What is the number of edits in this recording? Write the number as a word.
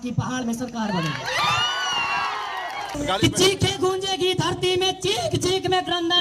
one